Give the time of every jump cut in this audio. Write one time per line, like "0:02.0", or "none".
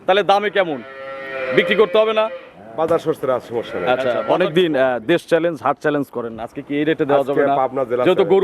0:04.2